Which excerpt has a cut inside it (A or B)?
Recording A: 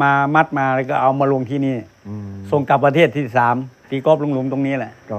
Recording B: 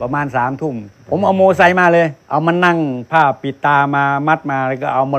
B